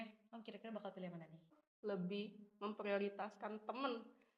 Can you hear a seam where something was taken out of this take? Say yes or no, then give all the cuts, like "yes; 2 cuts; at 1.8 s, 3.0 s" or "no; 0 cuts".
yes; 1 cut; at 1.6 s